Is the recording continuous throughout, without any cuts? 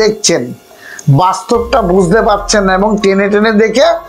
yes; 0 cuts

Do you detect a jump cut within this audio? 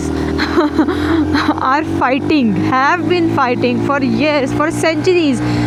no; 0 cuts

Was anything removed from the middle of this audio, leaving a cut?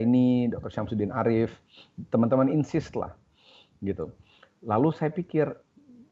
no; 0 cuts

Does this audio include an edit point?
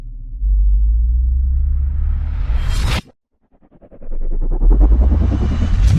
no; 0 cuts

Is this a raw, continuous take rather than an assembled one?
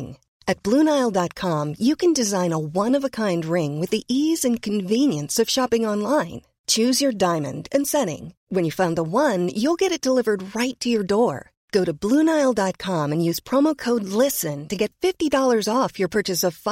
yes; 0 cuts

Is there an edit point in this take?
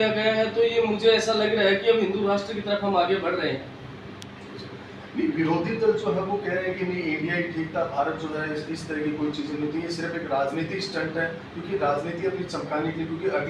no; 0 cuts

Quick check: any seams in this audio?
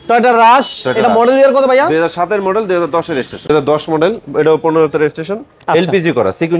yes; 1 cut; at 3.5 s

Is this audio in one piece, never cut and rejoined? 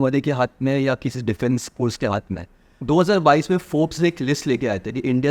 no; 1 cut; at 2.7 s

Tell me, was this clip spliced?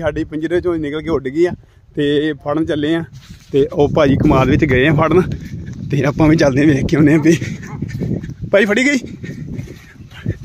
no; 0 cuts

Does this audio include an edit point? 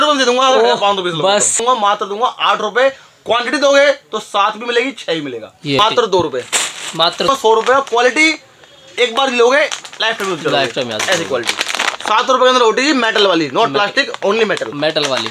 yes; 3 cuts; at 1.6 s, 5.8 s, 7.3 s

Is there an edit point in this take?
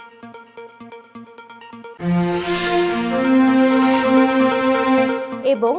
no; 0 cuts

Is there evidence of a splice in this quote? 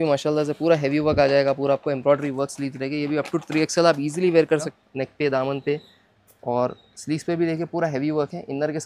yes; 1 cut; at 4.7 s

